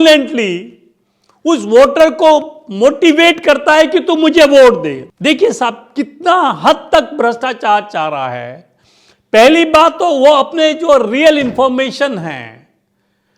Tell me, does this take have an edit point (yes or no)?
yes